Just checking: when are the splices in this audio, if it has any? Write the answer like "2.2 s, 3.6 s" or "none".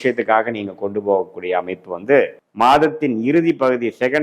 2.4 s